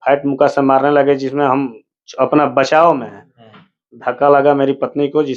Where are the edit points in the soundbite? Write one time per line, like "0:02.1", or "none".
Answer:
none